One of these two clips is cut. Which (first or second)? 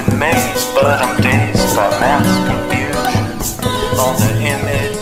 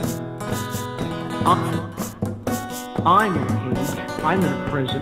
second